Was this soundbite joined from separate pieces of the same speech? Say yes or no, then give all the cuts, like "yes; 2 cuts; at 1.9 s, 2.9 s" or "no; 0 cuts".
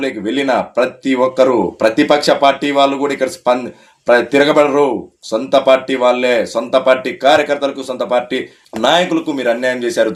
no; 0 cuts